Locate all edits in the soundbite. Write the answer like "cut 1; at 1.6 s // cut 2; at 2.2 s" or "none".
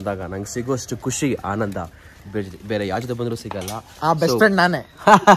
none